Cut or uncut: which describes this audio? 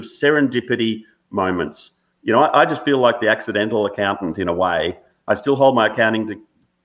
uncut